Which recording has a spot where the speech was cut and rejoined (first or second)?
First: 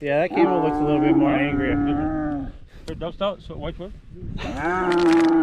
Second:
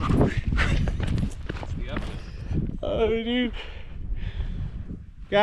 second